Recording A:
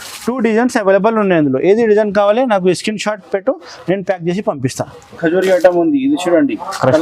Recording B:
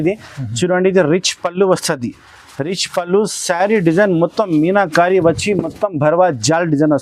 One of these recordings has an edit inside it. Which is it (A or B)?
A